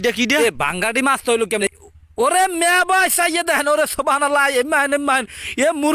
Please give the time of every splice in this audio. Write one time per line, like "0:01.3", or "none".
0:01.6

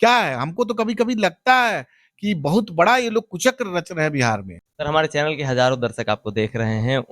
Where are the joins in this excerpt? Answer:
0:04.7

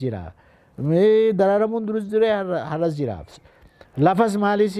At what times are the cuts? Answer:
none

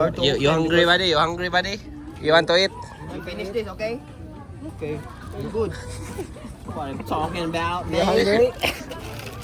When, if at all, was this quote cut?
none

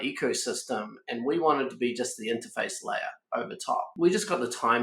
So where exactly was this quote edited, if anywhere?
0:03.9

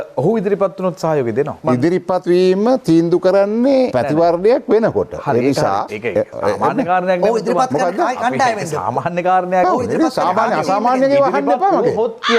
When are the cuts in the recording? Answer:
0:01.6

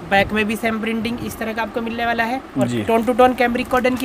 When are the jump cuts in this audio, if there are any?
none

